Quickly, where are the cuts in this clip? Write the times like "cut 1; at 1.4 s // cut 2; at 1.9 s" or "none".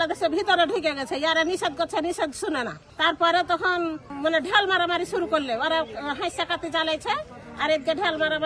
none